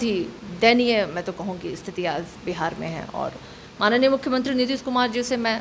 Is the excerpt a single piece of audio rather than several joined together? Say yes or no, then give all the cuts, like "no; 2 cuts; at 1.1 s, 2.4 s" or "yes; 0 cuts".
yes; 0 cuts